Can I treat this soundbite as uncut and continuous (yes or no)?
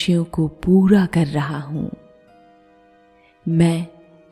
no